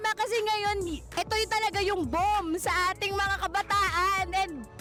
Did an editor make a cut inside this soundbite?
no; 0 cuts

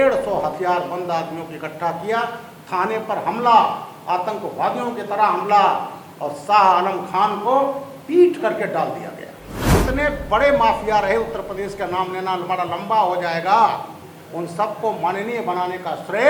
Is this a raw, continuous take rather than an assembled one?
no; 1 cut; at 9.7 s

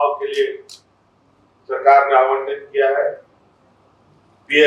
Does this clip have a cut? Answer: no; 0 cuts

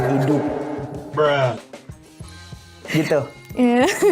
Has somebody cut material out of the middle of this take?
no; 0 cuts

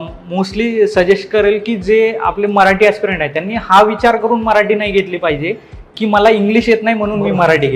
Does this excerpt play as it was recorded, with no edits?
yes; 0 cuts

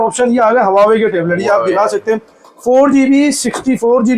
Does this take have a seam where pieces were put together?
no; 0 cuts

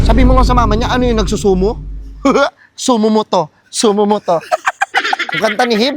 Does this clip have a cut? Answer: no; 0 cuts

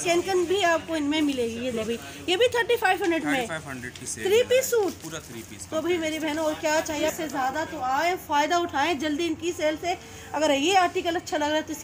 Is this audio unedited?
yes; 0 cuts

